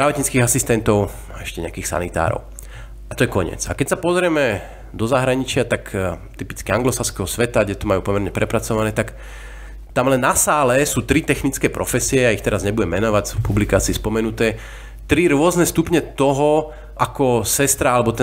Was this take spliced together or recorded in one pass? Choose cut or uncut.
uncut